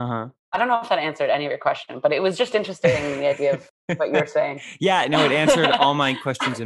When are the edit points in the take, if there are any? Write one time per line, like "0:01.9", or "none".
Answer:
none